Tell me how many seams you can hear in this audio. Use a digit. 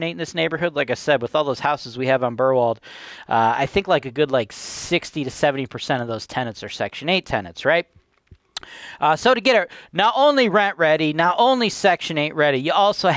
0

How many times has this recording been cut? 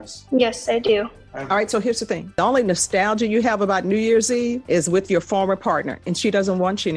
2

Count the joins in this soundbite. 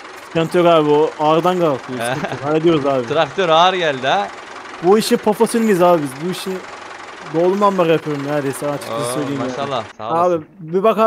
1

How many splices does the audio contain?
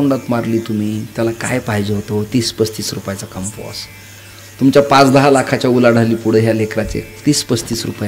0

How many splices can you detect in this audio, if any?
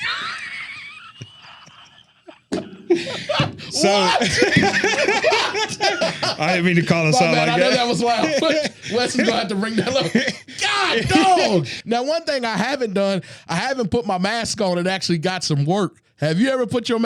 1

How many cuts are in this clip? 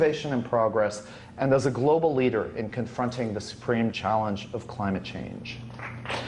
1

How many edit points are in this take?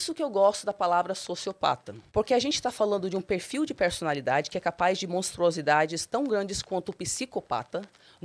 1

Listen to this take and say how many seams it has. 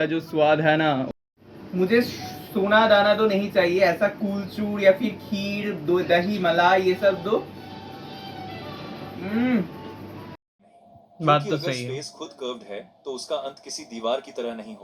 2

